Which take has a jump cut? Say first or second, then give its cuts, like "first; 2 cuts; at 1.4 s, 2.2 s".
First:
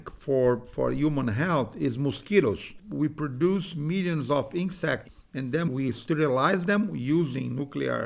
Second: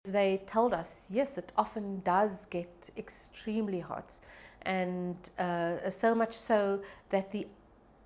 first; 2 cuts; at 2.8 s, 5.2 s